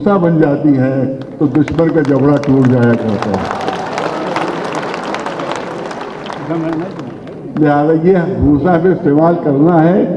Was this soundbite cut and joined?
no; 0 cuts

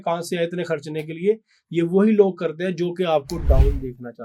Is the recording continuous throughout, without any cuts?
yes; 0 cuts

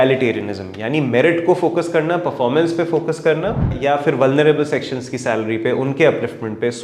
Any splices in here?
yes; 1 cut; at 3.7 s

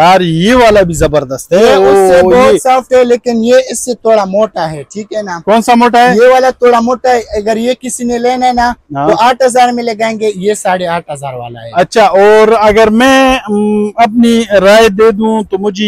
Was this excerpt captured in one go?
yes; 0 cuts

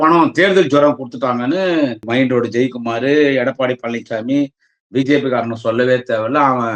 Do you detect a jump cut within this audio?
yes; 1 cut; at 2.0 s

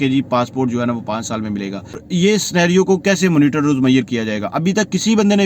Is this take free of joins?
no; 1 cut; at 2.0 s

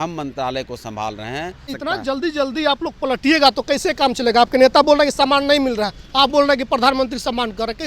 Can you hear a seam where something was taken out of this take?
yes; 1 cut; at 1.7 s

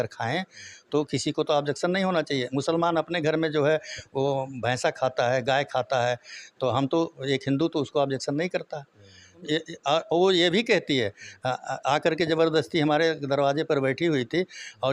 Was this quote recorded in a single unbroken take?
no; 1 cut; at 9.4 s

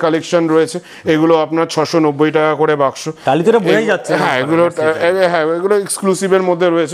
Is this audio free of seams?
yes; 0 cuts

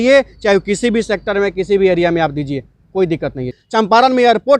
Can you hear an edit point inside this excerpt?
yes; 1 cut; at 3.5 s

